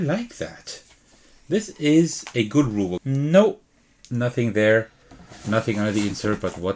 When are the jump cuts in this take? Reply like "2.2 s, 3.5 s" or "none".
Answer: 2.9 s